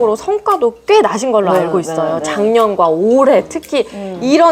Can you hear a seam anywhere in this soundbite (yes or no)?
no